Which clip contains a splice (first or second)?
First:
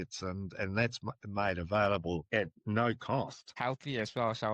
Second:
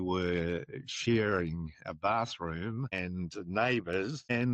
first